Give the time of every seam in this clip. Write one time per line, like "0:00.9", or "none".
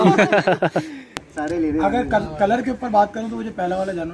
0:01.2